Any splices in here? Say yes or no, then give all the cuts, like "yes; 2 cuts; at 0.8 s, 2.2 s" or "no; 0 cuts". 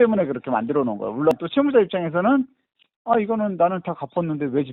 no; 0 cuts